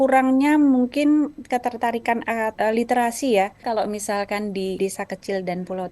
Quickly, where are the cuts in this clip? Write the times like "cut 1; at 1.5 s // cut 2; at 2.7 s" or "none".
cut 1; at 2.5 s // cut 2; at 3.6 s // cut 3; at 4.8 s